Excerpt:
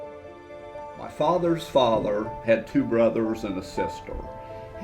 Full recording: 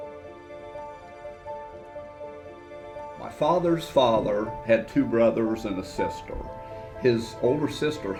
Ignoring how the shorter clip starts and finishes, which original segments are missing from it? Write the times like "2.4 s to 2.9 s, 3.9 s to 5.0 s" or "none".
1.0 s to 3.2 s